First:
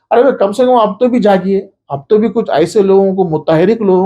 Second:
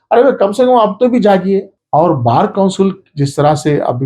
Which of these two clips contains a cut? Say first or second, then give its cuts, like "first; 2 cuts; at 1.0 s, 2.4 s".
second; 1 cut; at 1.8 s